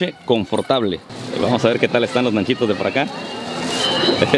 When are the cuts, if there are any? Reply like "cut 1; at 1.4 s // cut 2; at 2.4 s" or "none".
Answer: cut 1; at 1.0 s

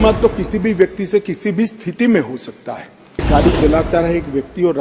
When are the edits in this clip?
cut 1; at 3.3 s

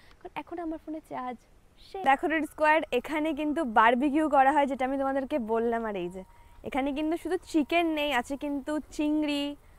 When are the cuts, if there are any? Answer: cut 1; at 2.0 s

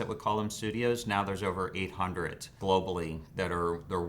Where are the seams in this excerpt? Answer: cut 1; at 2.6 s

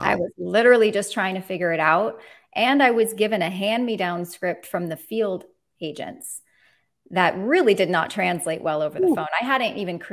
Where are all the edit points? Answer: none

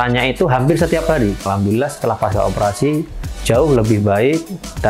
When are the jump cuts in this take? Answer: cut 1; at 1.4 s

